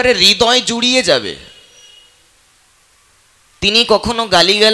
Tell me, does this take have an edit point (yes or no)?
no